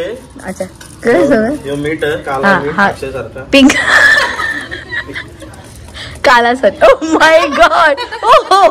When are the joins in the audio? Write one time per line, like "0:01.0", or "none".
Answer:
none